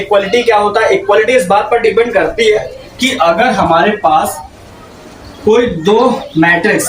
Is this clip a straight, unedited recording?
yes; 0 cuts

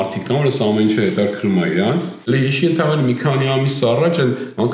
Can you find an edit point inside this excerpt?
yes; 1 cut; at 2.2 s

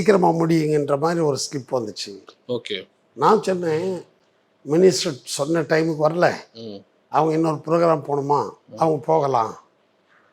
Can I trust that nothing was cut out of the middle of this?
yes; 0 cuts

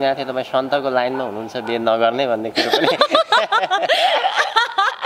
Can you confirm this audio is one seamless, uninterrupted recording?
yes; 0 cuts

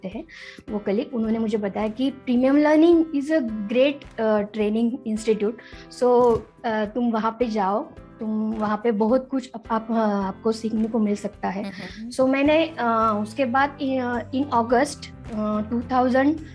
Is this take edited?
no; 0 cuts

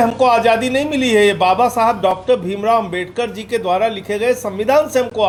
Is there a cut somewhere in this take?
no; 0 cuts

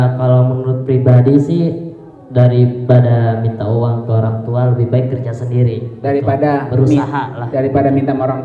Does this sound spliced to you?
no; 0 cuts

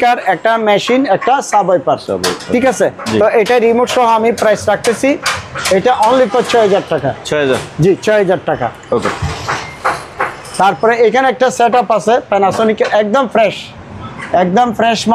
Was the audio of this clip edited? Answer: no; 0 cuts

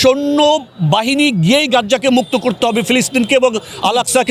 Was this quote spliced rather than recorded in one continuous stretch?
no; 0 cuts

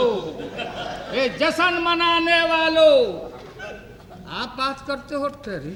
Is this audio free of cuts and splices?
yes; 0 cuts

